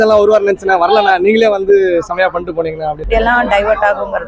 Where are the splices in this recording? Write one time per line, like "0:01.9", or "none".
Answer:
0:03.0